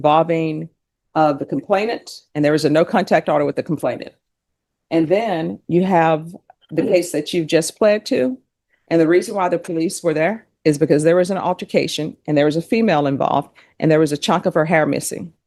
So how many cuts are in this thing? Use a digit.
0